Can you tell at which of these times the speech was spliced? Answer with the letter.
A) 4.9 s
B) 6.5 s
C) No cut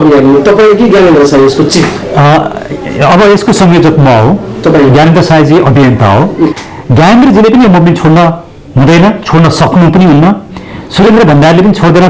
B